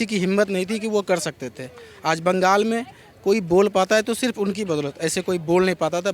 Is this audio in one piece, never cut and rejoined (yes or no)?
yes